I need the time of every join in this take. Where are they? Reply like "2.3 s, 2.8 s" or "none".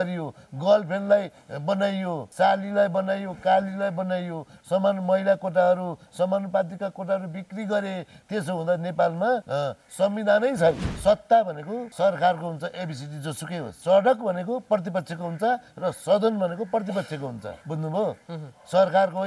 2.2 s, 9.5 s, 10.9 s, 11.8 s, 13.7 s, 17.5 s